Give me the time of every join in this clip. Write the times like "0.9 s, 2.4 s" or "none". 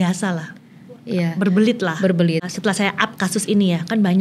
2.5 s